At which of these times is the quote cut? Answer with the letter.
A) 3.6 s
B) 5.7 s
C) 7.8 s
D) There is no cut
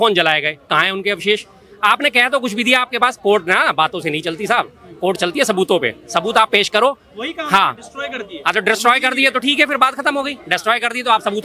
D